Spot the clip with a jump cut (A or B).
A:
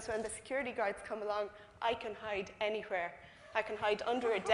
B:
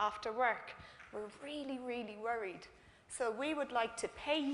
B